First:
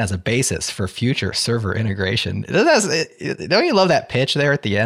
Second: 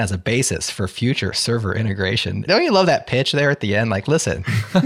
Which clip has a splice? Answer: second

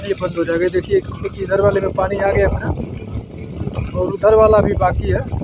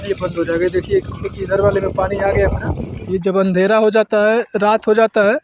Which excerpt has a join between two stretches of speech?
second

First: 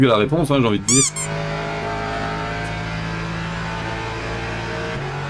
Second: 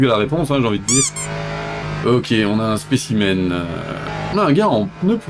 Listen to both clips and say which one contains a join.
first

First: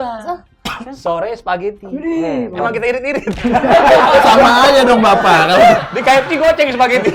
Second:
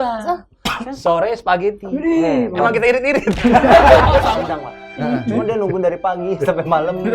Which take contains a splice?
second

